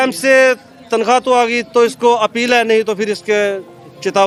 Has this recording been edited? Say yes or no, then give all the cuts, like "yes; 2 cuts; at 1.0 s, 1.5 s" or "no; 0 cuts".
no; 0 cuts